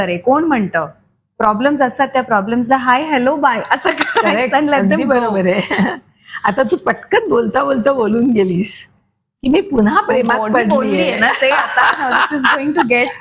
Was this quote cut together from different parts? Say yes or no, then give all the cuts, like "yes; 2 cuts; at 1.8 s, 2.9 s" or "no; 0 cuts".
no; 0 cuts